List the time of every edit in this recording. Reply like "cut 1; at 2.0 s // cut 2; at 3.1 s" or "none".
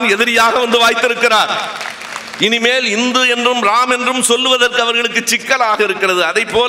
none

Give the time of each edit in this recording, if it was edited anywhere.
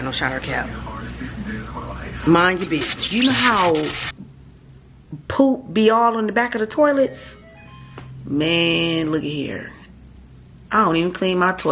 cut 1; at 3.0 s

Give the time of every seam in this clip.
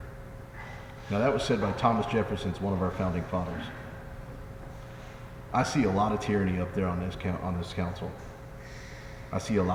none

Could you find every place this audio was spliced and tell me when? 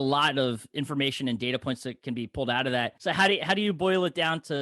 cut 1; at 3.0 s

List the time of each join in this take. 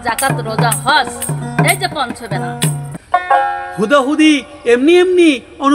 cut 1; at 2.9 s

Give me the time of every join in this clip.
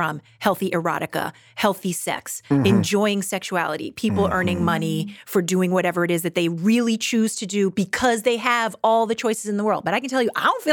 none

